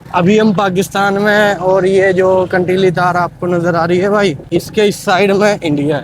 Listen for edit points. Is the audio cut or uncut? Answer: cut